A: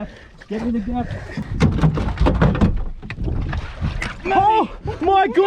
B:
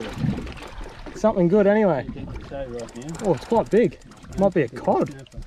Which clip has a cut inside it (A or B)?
A